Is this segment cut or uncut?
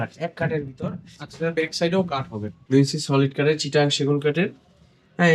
cut